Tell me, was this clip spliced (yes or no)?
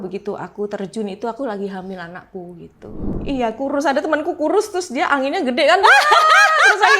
yes